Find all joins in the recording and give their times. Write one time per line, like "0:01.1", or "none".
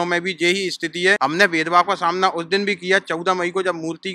0:01.2